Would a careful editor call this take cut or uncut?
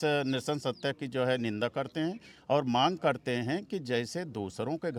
uncut